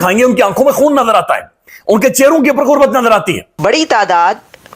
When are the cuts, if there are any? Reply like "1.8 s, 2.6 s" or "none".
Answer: 3.4 s